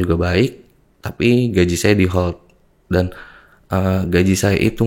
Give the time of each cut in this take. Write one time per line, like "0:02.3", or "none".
none